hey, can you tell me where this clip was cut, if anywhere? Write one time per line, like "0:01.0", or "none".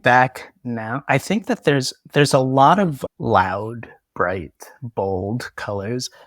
0:00.9
0:03.0